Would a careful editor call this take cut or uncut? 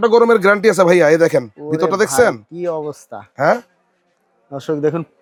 uncut